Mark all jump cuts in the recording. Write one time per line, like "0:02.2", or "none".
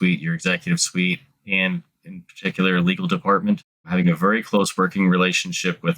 0:03.8